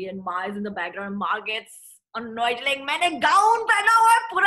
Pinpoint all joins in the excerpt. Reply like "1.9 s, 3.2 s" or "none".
none